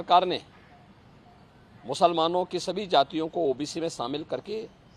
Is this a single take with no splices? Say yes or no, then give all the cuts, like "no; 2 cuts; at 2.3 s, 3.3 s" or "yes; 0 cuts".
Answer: yes; 0 cuts